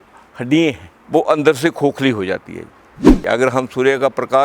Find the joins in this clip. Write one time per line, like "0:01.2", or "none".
0:00.9
0:03.2